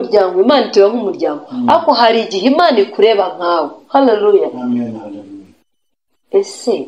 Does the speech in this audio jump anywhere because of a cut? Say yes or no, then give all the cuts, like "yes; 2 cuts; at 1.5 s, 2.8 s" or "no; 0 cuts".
no; 0 cuts